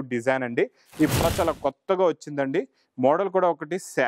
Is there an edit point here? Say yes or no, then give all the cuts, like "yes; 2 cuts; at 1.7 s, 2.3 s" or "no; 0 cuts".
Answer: yes; 1 cut; at 1.2 s